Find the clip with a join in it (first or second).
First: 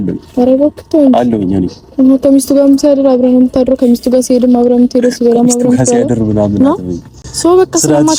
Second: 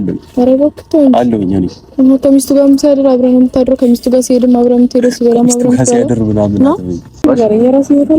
second